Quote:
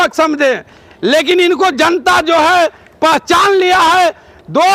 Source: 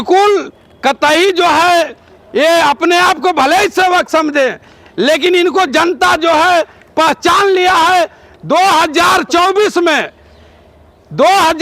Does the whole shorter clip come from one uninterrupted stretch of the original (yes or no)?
yes